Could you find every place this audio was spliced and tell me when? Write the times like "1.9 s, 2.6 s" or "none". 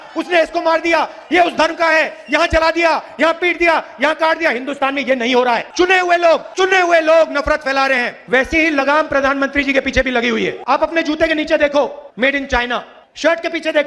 8.2 s, 10.6 s